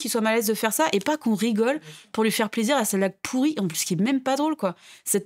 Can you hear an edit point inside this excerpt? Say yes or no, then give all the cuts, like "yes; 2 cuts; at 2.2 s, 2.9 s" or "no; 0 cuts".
no; 0 cuts